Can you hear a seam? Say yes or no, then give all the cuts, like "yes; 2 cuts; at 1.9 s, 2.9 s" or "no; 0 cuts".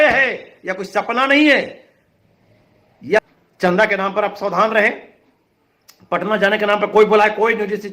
yes; 1 cut; at 3.2 s